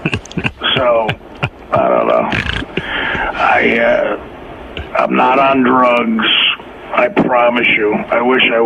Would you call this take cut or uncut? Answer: uncut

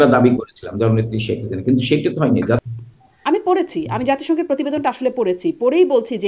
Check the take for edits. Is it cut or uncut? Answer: cut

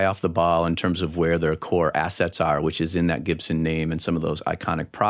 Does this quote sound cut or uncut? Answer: uncut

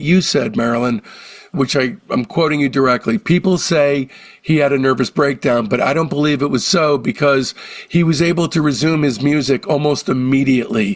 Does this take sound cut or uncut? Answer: uncut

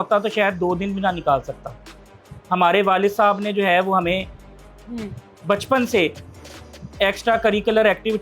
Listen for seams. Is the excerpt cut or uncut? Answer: uncut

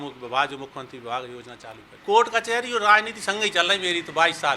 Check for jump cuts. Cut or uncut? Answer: cut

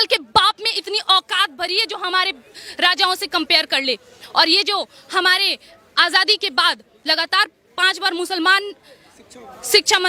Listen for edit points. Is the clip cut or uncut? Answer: uncut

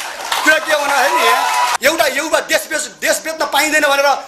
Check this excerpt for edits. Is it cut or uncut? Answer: cut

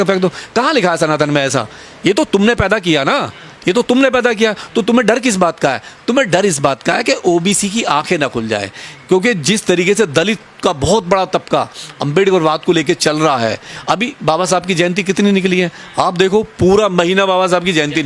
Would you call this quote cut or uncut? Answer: uncut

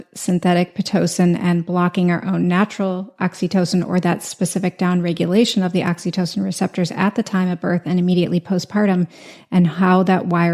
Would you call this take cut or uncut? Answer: uncut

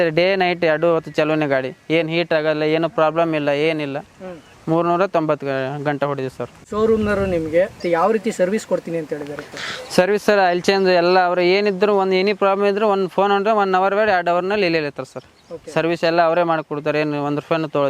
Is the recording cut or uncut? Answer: uncut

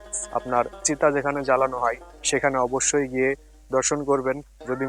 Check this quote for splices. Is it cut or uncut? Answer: uncut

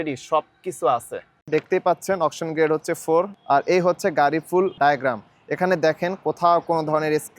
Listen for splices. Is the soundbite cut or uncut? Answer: cut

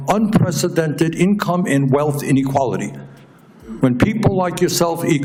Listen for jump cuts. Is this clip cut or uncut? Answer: uncut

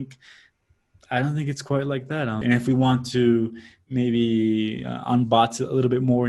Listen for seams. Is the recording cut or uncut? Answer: cut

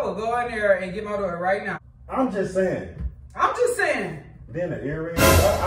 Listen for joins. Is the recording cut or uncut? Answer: cut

